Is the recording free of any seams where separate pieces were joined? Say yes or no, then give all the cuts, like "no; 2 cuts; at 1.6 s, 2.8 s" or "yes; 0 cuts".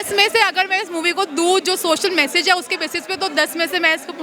yes; 0 cuts